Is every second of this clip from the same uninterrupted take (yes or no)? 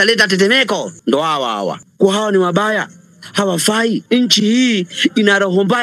no